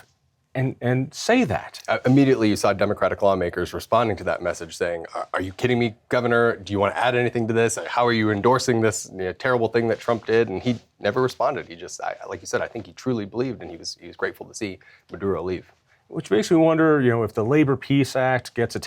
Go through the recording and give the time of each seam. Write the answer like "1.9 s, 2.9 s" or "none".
none